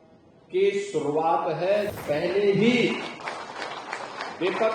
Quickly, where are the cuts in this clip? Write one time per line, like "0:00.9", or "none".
0:01.9